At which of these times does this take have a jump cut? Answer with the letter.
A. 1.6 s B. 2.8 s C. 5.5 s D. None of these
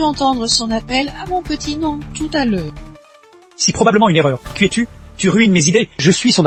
D